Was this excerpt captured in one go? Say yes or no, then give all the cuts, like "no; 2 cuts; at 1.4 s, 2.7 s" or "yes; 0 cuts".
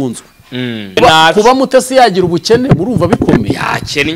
no; 1 cut; at 1.0 s